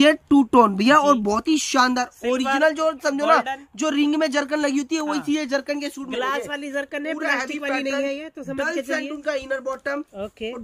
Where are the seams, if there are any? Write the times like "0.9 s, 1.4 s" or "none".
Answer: none